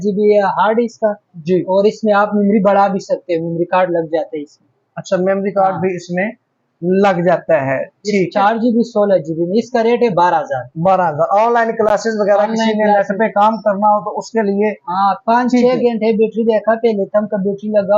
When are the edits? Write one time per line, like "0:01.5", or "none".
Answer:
none